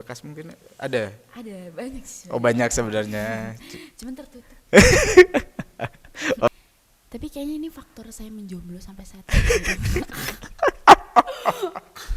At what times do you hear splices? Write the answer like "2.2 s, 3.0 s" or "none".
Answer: 6.5 s